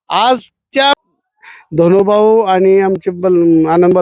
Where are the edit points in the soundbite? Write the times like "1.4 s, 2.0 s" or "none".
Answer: 0.9 s